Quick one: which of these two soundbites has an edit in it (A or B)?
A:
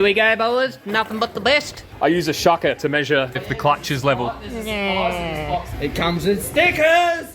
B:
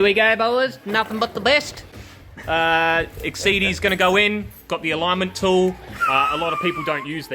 A